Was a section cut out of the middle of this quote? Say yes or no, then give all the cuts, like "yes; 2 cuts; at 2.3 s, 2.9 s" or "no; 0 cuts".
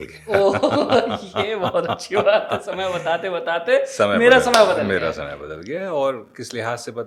no; 0 cuts